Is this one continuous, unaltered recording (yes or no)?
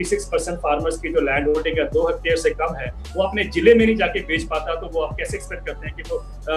yes